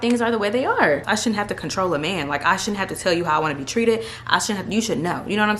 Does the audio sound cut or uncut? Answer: cut